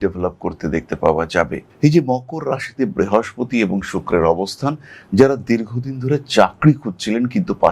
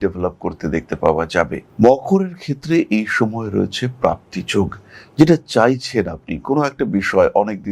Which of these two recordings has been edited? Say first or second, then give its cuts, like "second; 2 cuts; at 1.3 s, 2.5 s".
first; 1 cut; at 1.6 s